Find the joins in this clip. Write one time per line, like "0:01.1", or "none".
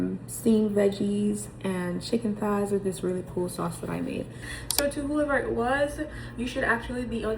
0:04.4